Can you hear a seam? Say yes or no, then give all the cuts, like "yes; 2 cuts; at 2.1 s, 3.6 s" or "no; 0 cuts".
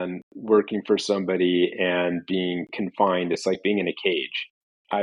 no; 0 cuts